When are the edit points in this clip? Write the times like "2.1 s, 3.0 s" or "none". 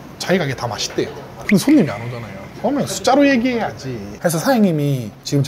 4.1 s